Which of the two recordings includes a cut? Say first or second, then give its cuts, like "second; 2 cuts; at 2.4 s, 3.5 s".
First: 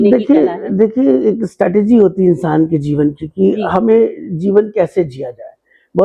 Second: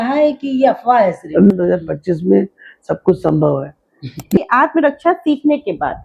second; 2 cuts; at 1.5 s, 4.4 s